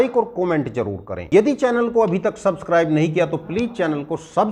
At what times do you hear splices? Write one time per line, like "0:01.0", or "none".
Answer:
0:01.3